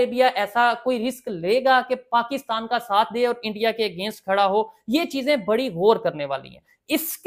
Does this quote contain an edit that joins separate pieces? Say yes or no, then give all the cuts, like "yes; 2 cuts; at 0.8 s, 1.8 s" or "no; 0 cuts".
no; 0 cuts